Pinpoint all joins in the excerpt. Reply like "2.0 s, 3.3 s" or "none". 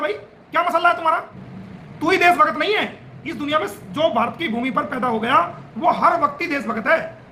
none